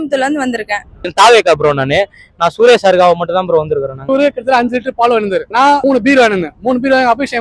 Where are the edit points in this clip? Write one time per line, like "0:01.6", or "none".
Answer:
0:01.0
0:04.0
0:05.8